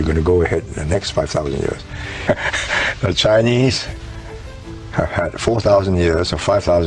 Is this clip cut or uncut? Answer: cut